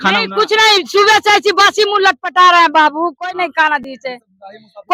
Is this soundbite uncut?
yes; 0 cuts

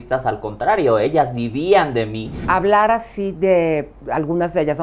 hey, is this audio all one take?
no; 1 cut; at 2.4 s

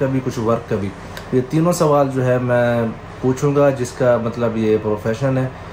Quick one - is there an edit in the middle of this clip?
no; 0 cuts

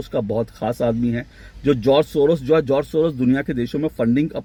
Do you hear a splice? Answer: no; 0 cuts

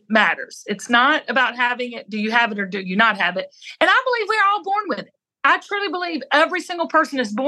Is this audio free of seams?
yes; 0 cuts

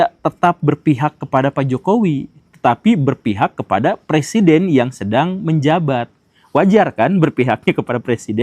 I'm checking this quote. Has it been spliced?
no; 0 cuts

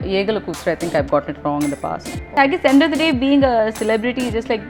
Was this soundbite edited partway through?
yes; 1 cut; at 2.4 s

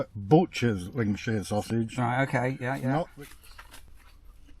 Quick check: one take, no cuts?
no; 1 cut; at 3.1 s

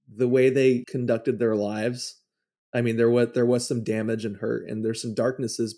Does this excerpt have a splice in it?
yes; 1 cut; at 0.9 s

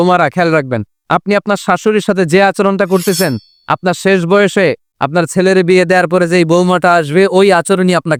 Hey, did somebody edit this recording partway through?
no; 0 cuts

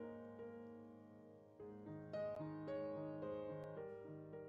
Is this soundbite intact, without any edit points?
yes; 0 cuts

